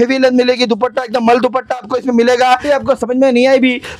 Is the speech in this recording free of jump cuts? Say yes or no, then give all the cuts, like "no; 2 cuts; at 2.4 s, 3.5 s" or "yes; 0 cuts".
no; 1 cut; at 2.6 s